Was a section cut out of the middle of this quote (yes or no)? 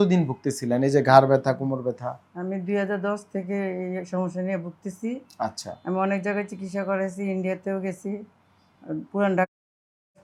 no